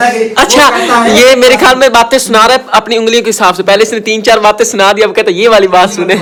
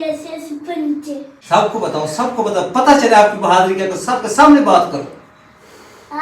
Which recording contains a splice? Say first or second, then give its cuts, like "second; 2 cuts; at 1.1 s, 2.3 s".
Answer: second; 1 cut; at 1.4 s